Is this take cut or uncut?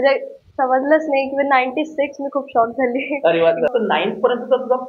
cut